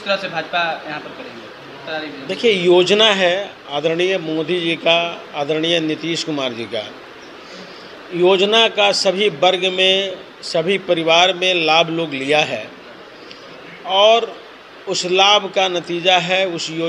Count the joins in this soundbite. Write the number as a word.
zero